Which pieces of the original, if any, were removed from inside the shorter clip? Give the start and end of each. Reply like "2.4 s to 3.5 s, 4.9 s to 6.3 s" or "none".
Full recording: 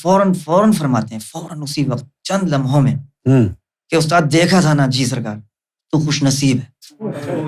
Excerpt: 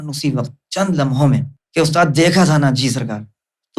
3.1 s to 3.7 s